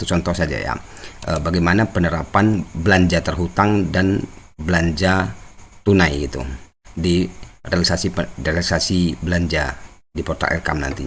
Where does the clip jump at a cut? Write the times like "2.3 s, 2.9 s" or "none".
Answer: none